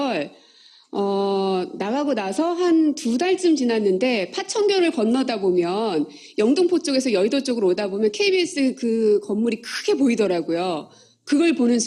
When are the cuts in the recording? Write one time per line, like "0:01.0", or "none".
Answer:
0:01.3